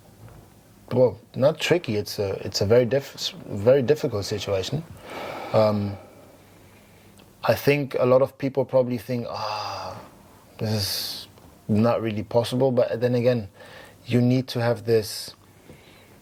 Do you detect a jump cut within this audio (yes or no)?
no